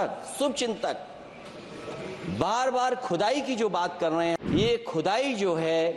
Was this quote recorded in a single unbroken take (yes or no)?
no